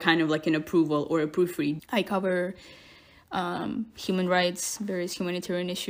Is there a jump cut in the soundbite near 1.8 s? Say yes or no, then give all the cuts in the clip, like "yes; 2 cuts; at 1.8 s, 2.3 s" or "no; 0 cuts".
yes; 1 cut; at 1.8 s